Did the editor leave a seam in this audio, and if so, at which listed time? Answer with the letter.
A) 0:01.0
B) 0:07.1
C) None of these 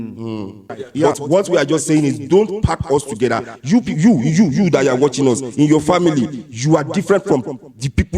A